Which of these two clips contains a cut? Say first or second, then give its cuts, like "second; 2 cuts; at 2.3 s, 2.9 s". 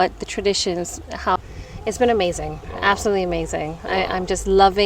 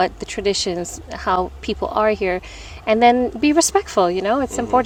first; 1 cut; at 1.4 s